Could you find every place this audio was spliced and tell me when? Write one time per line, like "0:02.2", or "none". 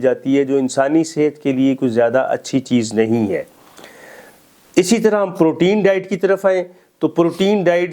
none